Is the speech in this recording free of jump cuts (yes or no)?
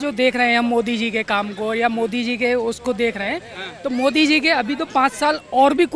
yes